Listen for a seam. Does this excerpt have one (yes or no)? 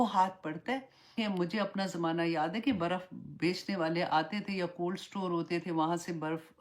yes